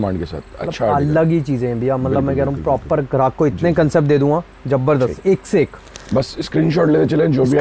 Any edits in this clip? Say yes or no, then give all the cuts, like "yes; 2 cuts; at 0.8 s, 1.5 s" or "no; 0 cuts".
no; 0 cuts